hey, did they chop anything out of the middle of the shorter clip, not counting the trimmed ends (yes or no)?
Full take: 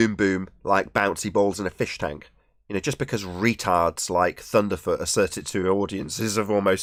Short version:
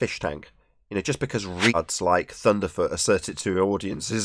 yes